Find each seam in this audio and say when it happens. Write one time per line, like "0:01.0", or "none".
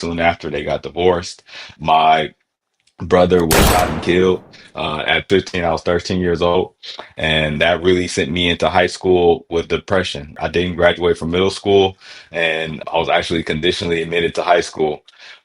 0:01.7
0:05.3
0:10.4
0:12.8